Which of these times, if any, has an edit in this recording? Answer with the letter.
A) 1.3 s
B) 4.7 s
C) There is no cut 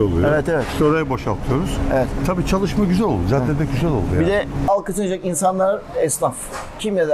B